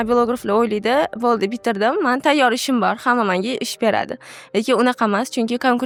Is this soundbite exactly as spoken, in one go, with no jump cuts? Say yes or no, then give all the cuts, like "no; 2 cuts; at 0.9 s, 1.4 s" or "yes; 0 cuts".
yes; 0 cuts